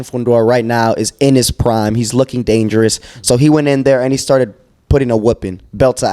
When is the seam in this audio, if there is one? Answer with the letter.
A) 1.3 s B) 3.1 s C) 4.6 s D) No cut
D